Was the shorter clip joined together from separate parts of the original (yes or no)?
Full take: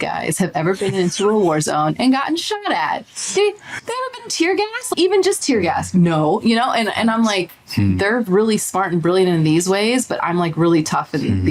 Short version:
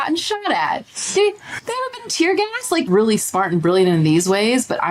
yes